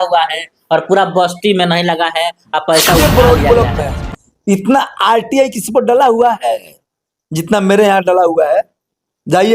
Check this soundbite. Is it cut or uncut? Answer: cut